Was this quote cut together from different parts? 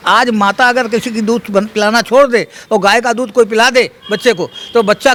no; 0 cuts

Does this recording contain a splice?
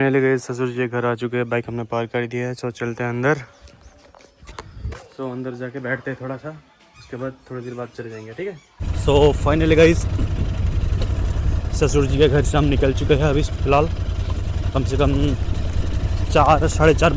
no; 0 cuts

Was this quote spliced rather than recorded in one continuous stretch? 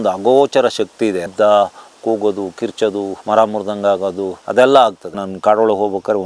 yes; 4 cuts; at 1.2 s, 3.2 s, 4.3 s, 5.2 s

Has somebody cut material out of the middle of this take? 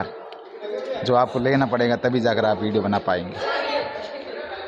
yes; 1 cut; at 3.4 s

